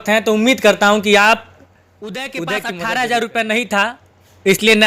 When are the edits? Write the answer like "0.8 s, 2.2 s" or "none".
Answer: 2.3 s